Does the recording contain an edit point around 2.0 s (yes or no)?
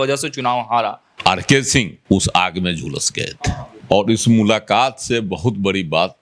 yes